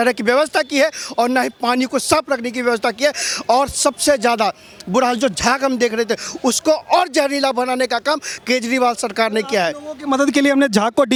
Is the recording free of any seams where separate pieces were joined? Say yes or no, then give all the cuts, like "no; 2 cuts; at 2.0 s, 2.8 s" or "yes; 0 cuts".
yes; 0 cuts